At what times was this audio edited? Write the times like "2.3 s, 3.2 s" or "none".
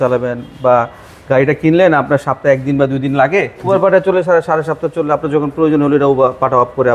3.7 s